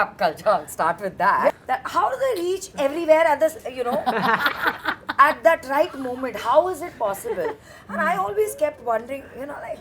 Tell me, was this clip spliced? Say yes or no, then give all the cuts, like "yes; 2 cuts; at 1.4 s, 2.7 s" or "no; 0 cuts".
yes; 1 cut; at 1.5 s